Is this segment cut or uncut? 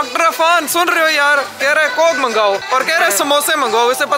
cut